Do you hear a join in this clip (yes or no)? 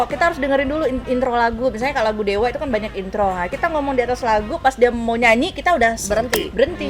no